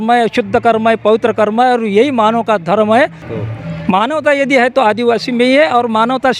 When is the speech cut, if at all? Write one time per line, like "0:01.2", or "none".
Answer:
0:03.3